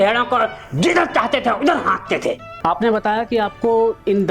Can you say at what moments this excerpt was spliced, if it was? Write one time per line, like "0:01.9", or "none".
0:02.5